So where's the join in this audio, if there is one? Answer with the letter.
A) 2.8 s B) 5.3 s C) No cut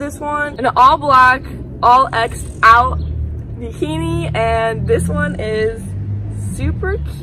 C